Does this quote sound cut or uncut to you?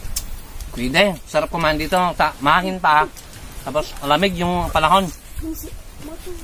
uncut